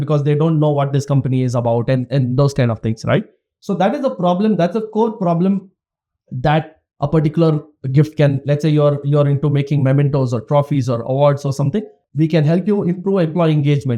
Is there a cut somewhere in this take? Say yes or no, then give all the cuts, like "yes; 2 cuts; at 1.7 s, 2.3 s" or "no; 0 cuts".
yes; 1 cut; at 12.0 s